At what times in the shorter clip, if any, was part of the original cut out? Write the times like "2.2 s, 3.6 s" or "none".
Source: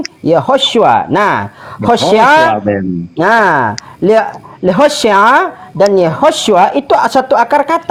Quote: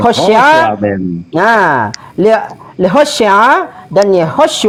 none